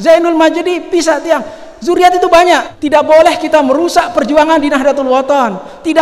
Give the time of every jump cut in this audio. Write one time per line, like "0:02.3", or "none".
0:02.7